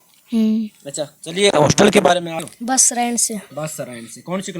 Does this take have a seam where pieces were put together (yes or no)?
yes